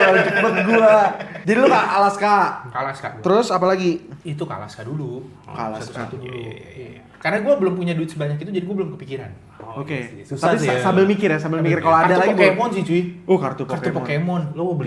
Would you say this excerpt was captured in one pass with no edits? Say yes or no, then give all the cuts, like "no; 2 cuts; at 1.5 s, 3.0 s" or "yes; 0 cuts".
yes; 0 cuts